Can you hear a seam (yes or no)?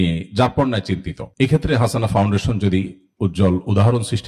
no